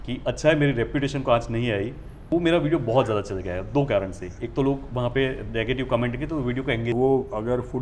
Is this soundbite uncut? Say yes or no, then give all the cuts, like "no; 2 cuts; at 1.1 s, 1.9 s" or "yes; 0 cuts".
no; 2 cuts; at 2.2 s, 6.9 s